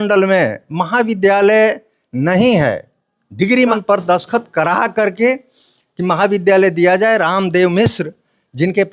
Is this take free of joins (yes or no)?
no